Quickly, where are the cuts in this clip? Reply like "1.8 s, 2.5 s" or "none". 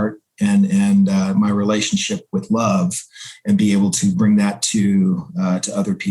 none